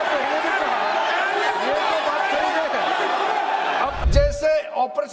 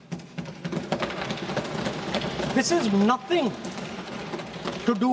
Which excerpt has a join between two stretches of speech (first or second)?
first